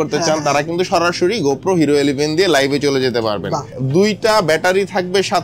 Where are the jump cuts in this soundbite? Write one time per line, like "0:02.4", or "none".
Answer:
0:03.7